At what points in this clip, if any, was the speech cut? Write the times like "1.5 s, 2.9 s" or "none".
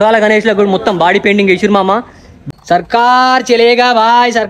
2.3 s